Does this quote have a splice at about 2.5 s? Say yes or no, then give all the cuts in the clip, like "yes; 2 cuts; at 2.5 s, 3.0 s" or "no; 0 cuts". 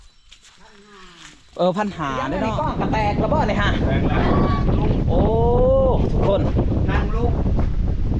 yes; 1 cut; at 2.5 s